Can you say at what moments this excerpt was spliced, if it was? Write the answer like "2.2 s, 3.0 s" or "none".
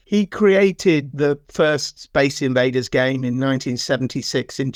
none